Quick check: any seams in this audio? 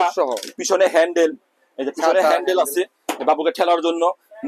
no; 0 cuts

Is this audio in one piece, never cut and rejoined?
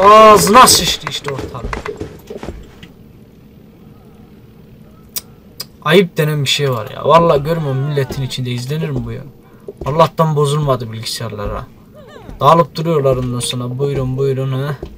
yes; 0 cuts

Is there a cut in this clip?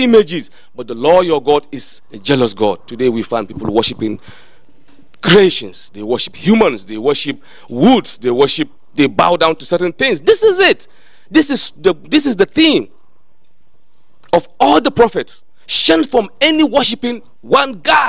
no; 0 cuts

